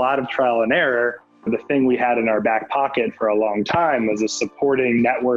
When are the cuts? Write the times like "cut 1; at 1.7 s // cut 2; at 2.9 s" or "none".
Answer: cut 1; at 1.3 s

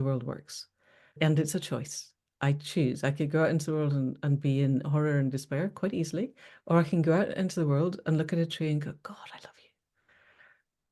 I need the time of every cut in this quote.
cut 1; at 1.2 s

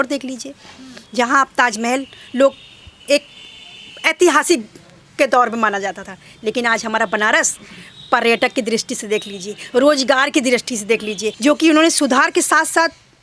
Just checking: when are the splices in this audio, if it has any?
cut 1; at 11.3 s

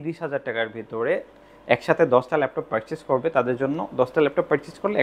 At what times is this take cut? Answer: none

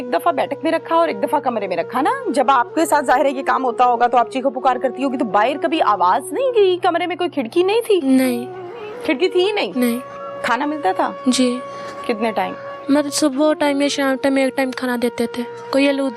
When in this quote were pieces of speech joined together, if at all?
none

